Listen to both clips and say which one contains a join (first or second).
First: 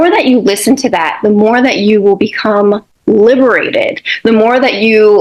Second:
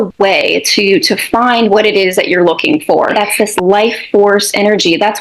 second